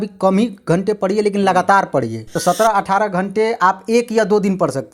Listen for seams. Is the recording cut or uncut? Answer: cut